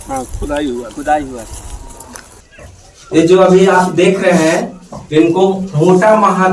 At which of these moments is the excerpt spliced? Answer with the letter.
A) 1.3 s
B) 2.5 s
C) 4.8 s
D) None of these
B